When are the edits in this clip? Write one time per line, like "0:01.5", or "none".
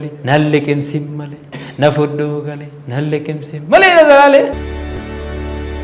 0:04.6